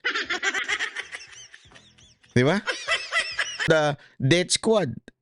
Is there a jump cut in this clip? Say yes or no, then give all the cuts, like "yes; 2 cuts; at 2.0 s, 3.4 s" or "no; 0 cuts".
yes; 1 cut; at 3.6 s